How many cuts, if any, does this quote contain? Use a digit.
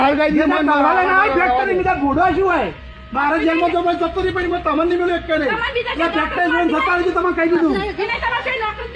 0